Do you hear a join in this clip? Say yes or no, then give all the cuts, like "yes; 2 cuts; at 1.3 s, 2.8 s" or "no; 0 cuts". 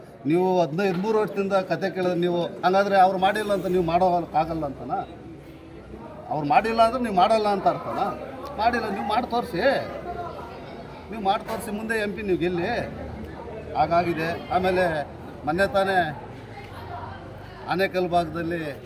no; 0 cuts